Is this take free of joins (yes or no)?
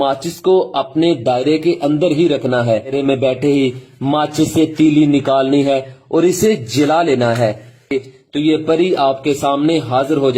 no